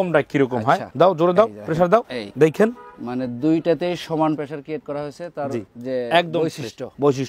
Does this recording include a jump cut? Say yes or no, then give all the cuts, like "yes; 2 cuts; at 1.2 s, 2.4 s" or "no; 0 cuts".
no; 0 cuts